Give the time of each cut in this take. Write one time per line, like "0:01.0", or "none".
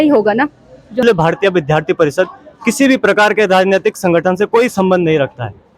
0:01.0